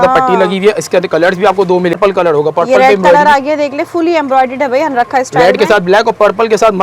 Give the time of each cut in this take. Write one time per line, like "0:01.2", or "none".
0:02.0

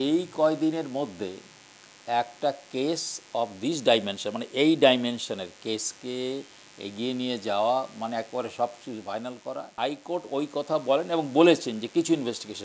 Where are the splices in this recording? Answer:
0:09.7

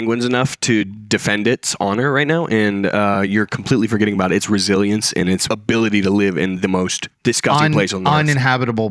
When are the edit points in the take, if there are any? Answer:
0:05.4

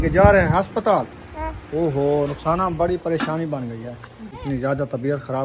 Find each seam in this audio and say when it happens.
0:04.3

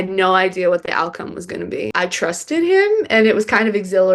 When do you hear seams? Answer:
0:01.9

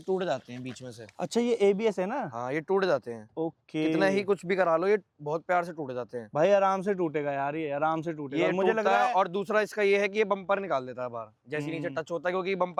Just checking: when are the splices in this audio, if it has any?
none

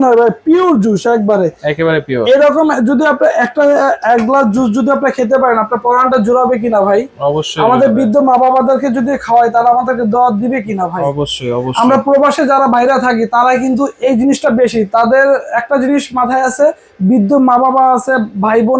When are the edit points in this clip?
none

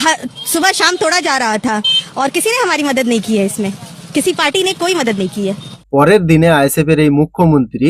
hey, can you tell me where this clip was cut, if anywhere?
0:05.7

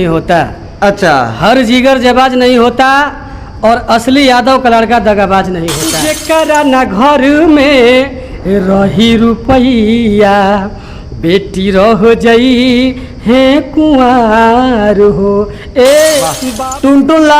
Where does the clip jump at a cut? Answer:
0:06.1
0:16.4

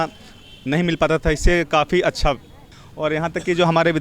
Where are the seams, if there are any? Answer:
0:02.8

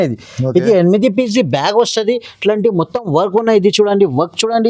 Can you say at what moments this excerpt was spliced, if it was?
none

